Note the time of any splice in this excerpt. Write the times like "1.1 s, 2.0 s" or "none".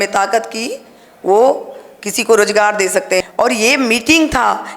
3.2 s